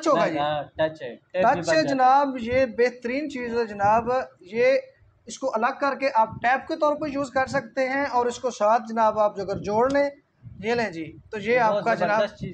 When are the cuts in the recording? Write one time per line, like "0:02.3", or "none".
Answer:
none